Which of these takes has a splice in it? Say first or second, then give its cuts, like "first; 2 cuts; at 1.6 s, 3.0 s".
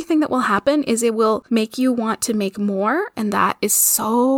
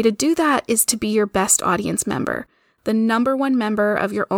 first; 1 cut; at 1.4 s